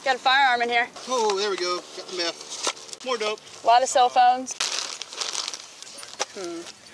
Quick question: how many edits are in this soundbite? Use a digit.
4